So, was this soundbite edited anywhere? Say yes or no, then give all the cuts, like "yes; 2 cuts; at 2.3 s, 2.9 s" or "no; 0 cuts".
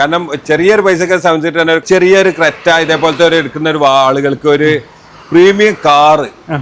yes; 1 cut; at 1.8 s